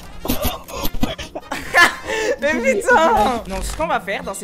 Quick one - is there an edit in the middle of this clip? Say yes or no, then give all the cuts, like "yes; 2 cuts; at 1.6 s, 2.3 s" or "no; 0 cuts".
yes; 1 cut; at 3.4 s